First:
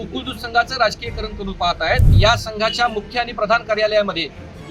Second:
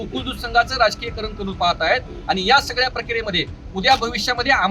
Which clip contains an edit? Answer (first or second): first